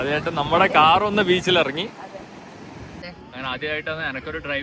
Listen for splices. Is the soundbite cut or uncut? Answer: cut